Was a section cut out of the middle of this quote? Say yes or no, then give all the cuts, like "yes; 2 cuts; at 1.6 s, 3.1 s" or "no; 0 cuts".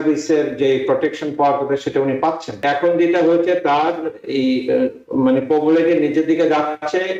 yes; 1 cut; at 2.6 s